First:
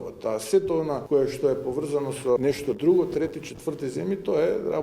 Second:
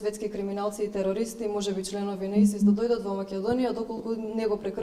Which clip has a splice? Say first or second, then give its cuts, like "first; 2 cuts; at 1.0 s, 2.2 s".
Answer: first; 2 cuts; at 1.0 s, 2.4 s